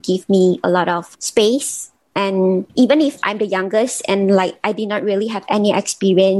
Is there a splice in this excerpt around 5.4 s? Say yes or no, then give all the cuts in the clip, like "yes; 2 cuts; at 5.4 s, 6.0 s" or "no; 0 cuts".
no; 2 cuts; at 1.1 s, 2.7 s